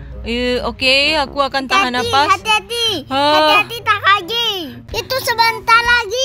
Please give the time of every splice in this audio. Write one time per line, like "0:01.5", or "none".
0:04.8